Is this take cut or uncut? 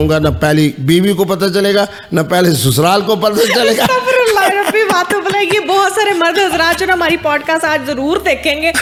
uncut